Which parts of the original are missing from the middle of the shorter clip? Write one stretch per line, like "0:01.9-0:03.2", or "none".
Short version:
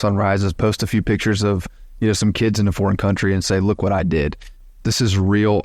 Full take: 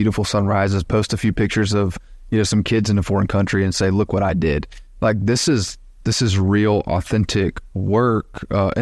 0:04.8-0:05.7